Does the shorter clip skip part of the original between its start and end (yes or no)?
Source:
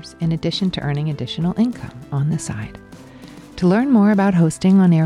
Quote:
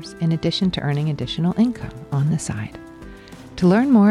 no